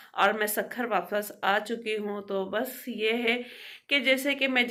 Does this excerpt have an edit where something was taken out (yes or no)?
no